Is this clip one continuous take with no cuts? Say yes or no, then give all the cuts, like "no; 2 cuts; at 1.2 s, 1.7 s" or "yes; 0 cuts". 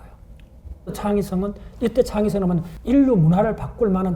no; 2 cuts; at 0.9 s, 2.7 s